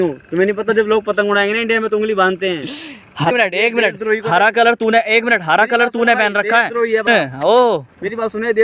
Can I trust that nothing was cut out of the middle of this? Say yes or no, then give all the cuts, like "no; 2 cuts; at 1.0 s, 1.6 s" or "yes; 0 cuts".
yes; 0 cuts